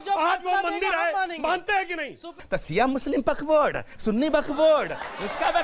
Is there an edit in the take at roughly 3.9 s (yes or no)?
no